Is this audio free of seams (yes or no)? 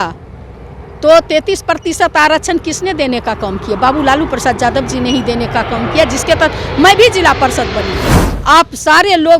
no